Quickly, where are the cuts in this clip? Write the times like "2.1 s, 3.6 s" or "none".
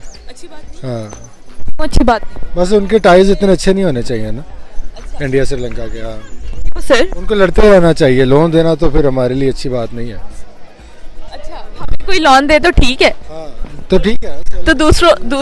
none